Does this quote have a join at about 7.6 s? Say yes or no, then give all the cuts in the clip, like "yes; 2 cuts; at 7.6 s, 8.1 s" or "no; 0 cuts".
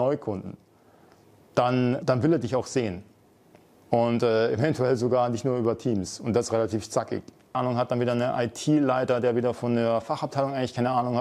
yes; 2 cuts; at 2.0 s, 7.6 s